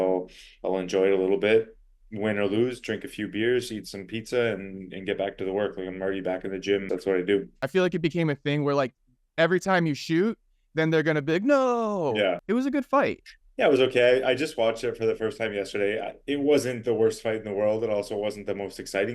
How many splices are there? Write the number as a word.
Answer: three